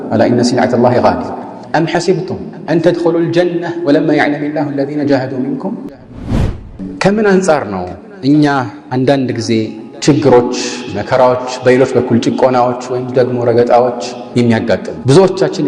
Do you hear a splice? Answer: yes; 1 cut; at 6.3 s

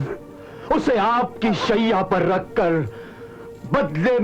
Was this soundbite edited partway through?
no; 0 cuts

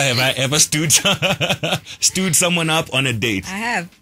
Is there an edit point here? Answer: no; 0 cuts

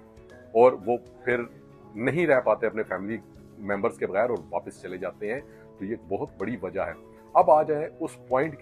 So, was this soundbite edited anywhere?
no; 0 cuts

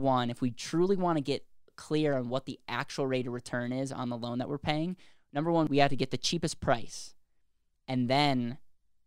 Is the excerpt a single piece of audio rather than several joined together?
no; 1 cut; at 5.7 s

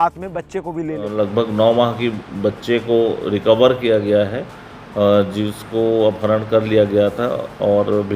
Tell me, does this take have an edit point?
yes; 1 cut; at 1.1 s

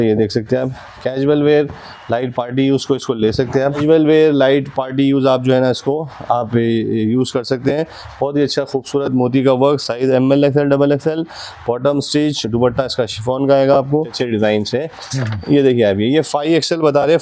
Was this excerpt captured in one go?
no; 2 cuts; at 3.6 s, 14.1 s

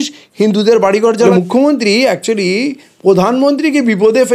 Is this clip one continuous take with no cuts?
no; 1 cut; at 1.3 s

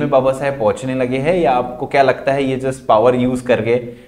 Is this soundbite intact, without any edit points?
yes; 0 cuts

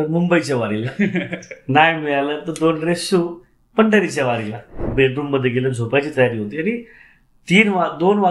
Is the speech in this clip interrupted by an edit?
yes; 1 cut; at 4.8 s

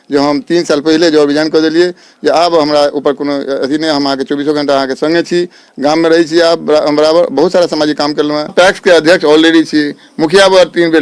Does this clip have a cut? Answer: yes; 1 cut; at 8.5 s

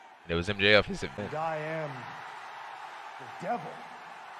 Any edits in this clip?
yes; 1 cut; at 1.2 s

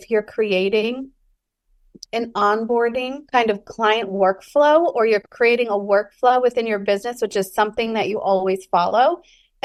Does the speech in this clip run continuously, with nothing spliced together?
yes; 0 cuts

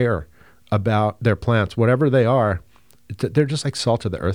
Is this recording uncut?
yes; 0 cuts

